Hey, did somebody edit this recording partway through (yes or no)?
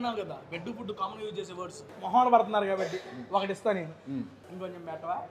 yes